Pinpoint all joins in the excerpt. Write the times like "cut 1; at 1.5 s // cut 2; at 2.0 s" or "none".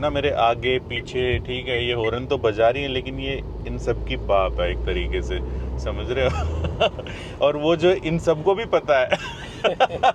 none